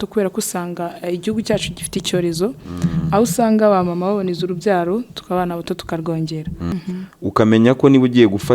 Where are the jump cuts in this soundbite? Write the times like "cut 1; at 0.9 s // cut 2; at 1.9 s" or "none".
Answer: cut 1; at 6.7 s

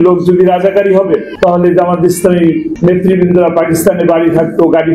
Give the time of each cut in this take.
cut 1; at 1.3 s // cut 2; at 2.7 s

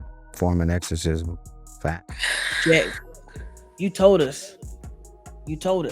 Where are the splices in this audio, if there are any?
cut 1; at 2.2 s

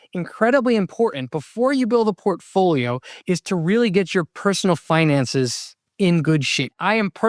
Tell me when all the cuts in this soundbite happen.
none

